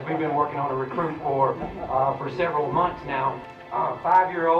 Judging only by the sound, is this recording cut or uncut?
cut